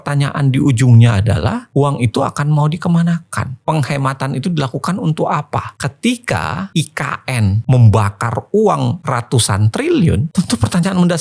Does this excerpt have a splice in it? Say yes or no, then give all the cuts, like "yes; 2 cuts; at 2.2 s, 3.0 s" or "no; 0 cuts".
no; 0 cuts